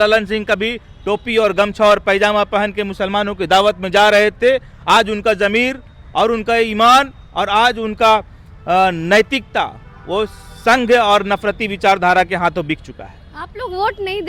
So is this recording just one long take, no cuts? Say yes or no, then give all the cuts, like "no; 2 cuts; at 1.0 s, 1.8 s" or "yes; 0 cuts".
yes; 0 cuts